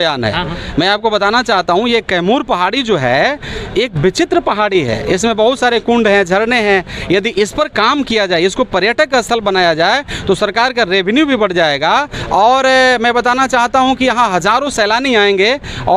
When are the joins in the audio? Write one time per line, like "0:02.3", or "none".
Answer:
none

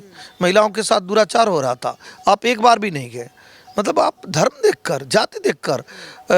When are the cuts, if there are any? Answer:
none

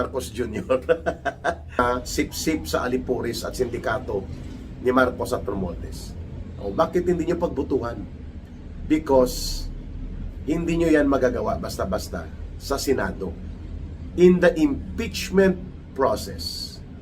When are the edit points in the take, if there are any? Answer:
0:01.8

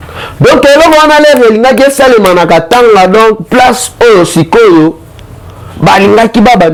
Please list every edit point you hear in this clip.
none

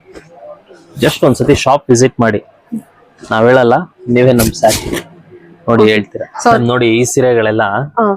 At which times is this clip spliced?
0:06.6

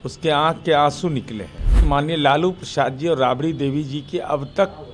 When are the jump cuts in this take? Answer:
0:01.8

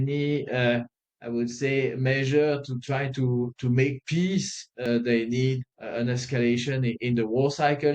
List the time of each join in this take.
0:04.8
0:05.7

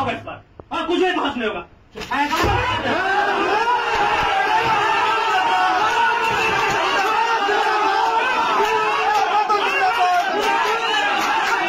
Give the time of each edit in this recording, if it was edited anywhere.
none

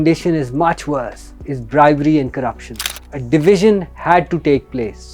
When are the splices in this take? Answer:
0:03.1

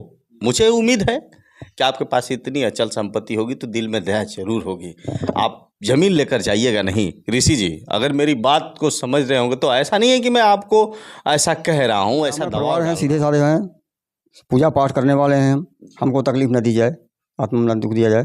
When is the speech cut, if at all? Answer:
0:12.6

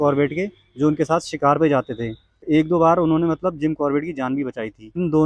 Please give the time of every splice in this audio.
none

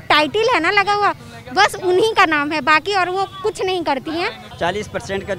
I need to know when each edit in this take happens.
0:04.5

